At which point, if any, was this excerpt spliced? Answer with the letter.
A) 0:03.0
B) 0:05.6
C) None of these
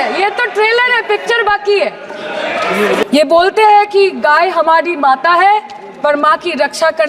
A